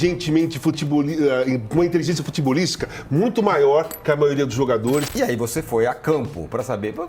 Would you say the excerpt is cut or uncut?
cut